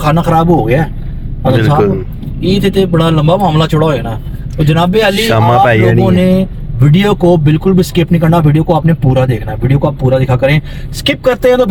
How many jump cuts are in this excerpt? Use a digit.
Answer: 0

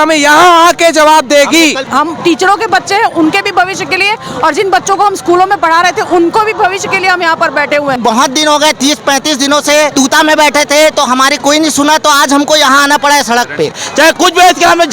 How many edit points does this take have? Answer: 4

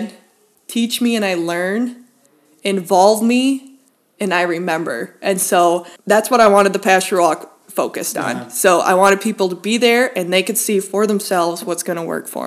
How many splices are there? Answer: 1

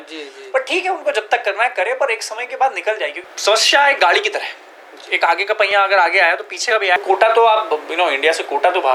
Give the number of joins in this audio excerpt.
2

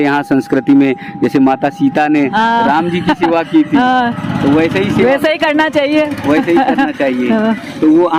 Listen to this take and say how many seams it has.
0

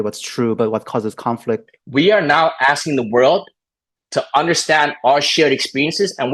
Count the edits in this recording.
1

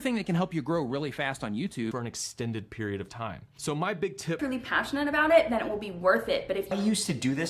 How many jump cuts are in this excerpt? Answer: 3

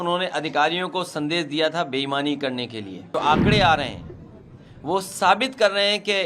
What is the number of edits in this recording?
1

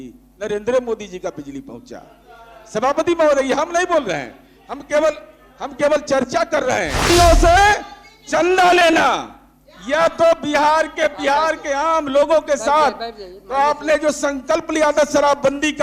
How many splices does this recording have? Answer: 1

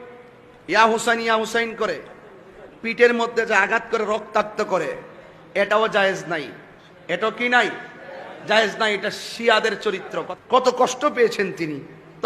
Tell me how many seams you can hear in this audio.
1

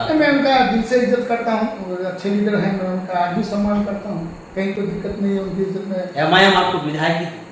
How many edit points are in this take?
0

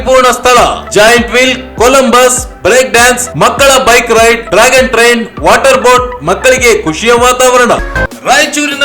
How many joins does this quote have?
1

